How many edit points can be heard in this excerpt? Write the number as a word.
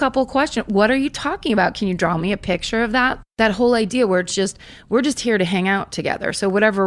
one